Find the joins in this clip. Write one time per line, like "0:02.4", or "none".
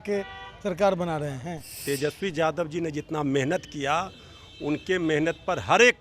0:01.8

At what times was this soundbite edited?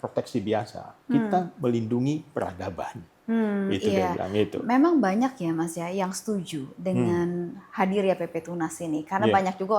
none

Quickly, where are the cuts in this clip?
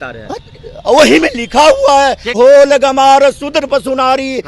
0:02.2

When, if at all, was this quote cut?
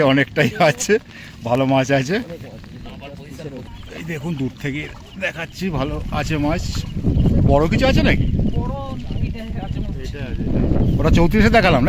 0:03.7

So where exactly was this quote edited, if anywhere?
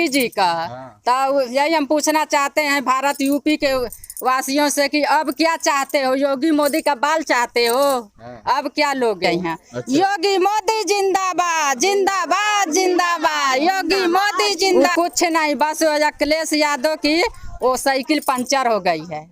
0:09.7
0:14.7

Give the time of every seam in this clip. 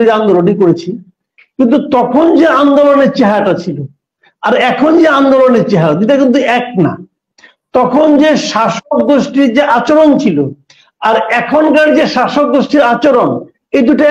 none

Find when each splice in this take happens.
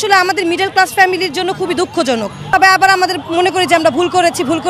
0:02.5

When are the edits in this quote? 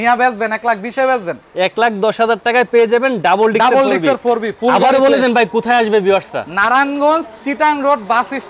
none

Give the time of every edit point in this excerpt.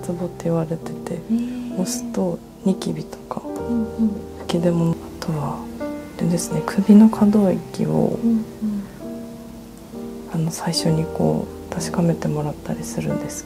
0:04.9

